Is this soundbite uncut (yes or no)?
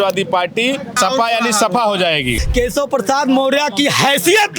no